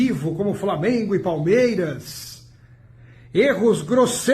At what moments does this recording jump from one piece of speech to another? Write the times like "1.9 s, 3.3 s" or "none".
none